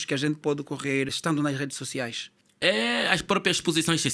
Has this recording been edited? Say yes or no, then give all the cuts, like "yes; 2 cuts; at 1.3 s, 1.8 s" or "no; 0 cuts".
no; 0 cuts